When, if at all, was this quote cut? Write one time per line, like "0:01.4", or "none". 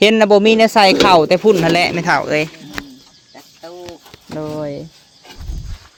none